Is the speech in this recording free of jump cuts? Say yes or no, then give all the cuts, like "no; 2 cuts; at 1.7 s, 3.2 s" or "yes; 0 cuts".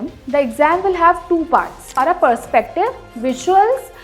no; 1 cut; at 1.9 s